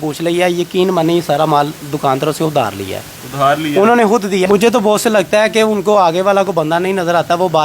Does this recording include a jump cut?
yes; 1 cut; at 4.5 s

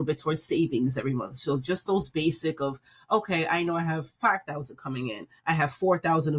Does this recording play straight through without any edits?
yes; 0 cuts

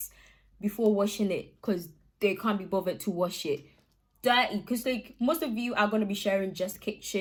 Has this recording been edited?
no; 0 cuts

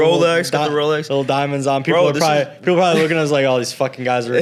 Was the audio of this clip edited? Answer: no; 0 cuts

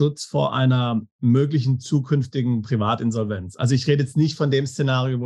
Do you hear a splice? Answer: no; 0 cuts

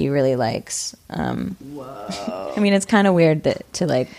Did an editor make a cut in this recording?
yes; 1 cut; at 2.4 s

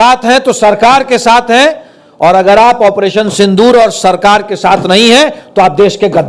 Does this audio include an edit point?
no; 0 cuts

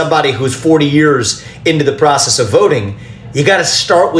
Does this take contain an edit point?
no; 0 cuts

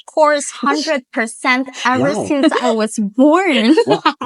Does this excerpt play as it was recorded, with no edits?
yes; 0 cuts

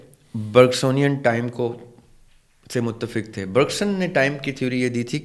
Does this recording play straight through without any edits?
yes; 0 cuts

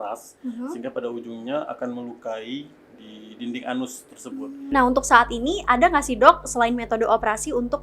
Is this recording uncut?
no; 1 cut; at 4.5 s

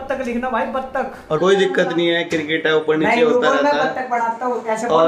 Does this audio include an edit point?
yes; 1 cut; at 1.4 s

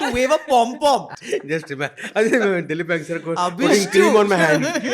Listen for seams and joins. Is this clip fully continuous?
no; 1 cut; at 1.2 s

